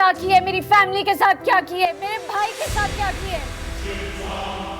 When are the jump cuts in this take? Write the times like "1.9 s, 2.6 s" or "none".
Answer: none